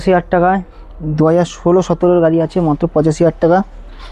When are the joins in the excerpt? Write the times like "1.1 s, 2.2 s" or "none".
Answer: none